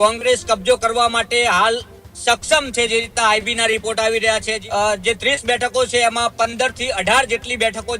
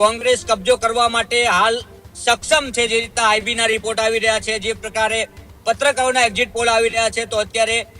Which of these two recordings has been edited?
first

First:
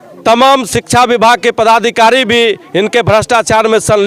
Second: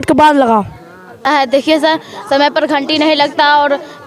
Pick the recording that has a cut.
second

